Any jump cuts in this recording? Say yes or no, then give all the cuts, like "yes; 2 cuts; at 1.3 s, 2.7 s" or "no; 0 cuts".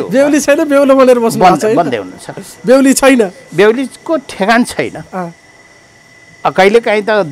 no; 0 cuts